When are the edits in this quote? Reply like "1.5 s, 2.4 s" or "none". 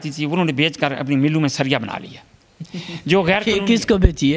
none

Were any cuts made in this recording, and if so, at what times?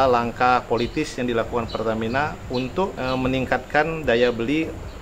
2.9 s

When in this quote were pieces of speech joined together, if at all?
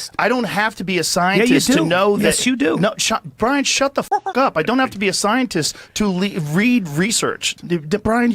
7.4 s

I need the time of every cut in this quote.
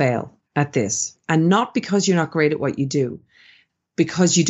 1.1 s

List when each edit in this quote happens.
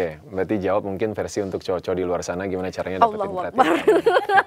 none

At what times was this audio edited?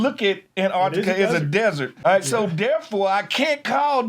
1.9 s

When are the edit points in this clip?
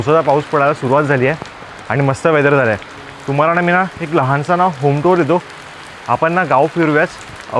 none

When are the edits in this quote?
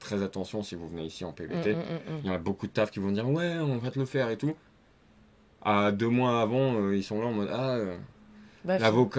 none

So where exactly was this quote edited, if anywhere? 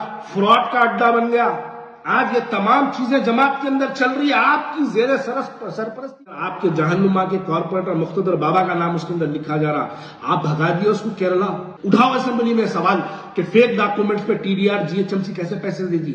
6.4 s, 11.7 s

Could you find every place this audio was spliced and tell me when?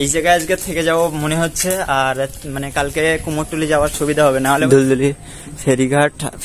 4.6 s

